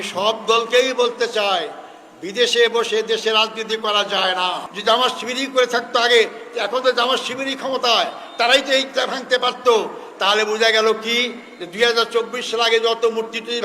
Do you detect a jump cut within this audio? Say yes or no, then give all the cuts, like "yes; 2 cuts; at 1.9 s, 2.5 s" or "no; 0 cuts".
yes; 1 cut; at 4.7 s